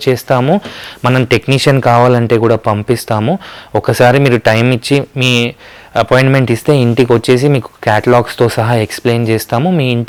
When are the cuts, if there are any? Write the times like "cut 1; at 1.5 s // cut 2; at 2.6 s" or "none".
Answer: none